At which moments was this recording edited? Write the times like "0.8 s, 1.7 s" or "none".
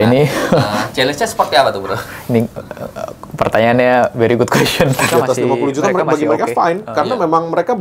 5.1 s